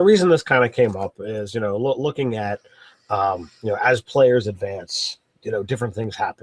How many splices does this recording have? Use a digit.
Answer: 1